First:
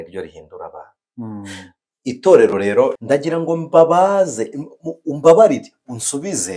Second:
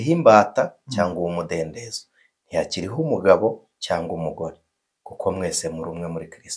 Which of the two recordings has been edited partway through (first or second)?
first